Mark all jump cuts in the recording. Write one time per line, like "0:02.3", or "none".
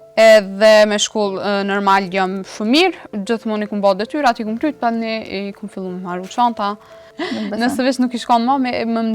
0:06.9